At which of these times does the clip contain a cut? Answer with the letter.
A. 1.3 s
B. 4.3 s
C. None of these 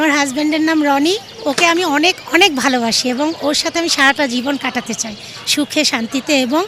C